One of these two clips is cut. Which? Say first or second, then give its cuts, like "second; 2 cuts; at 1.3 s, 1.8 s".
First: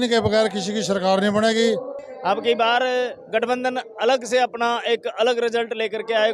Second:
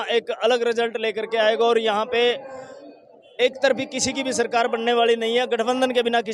first; 1 cut; at 2.0 s